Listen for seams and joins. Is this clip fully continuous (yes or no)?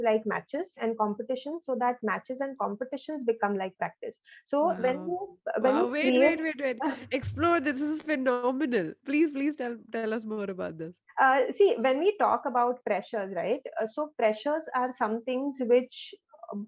yes